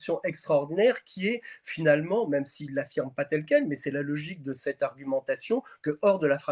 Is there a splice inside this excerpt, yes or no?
no